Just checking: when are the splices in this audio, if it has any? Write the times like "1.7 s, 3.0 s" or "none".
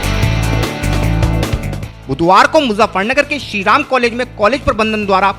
1.4 s